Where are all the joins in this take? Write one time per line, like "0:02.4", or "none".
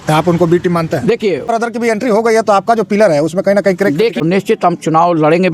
0:01.5
0:04.1